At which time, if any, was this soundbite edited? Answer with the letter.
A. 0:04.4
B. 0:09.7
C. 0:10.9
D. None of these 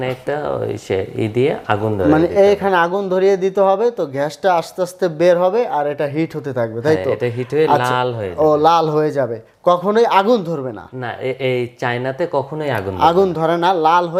D